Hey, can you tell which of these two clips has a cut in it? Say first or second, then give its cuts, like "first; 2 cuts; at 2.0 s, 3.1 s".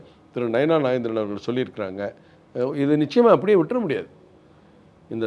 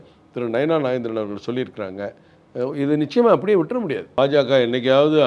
second; 1 cut; at 4.1 s